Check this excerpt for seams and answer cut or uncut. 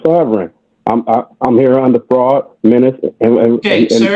uncut